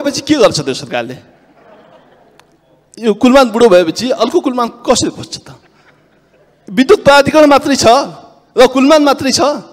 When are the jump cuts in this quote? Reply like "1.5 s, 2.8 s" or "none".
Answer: none